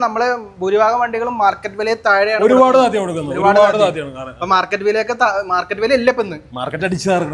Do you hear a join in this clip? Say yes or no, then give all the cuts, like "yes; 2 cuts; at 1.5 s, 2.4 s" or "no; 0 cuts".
no; 0 cuts